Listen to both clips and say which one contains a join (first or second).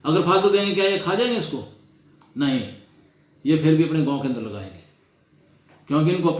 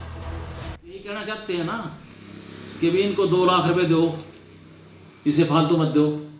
second